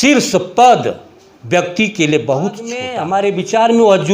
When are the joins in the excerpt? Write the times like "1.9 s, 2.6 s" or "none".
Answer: 2.9 s